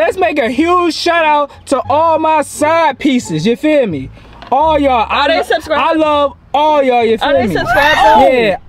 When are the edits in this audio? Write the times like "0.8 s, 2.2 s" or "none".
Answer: none